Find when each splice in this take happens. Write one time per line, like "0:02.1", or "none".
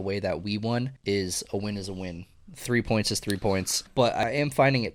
0:00.9
0:04.0